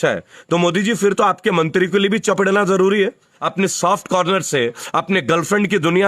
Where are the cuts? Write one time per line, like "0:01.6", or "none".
0:03.4